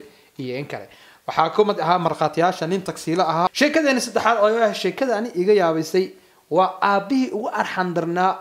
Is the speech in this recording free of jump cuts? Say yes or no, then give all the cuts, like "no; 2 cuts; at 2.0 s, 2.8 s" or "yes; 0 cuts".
no; 1 cut; at 3.5 s